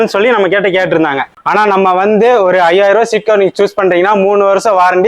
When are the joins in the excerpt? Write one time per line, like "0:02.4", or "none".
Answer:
0:01.3

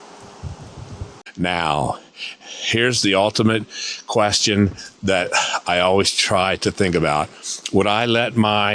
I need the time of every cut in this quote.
0:01.2

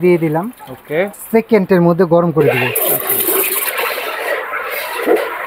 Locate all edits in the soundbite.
0:01.2

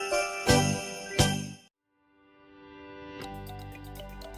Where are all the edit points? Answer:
0:01.5

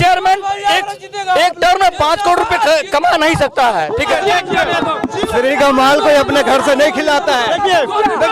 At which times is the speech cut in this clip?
0:04.1

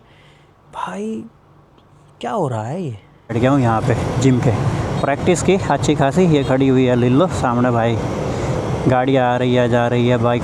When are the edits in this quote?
0:03.3

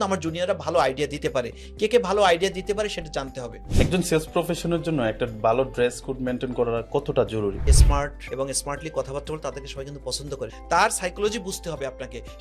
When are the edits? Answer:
0:03.6
0:07.7
0:10.6

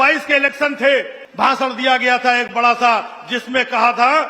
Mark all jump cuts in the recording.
0:01.2

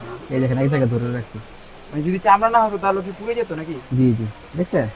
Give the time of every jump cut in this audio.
none

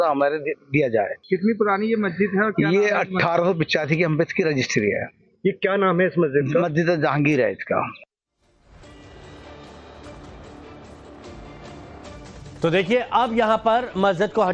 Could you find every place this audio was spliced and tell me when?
none

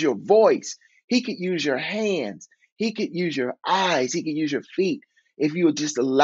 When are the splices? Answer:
none

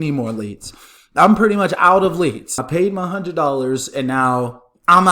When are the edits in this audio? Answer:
0:02.6

